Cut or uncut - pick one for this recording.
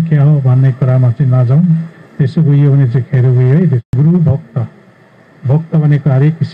cut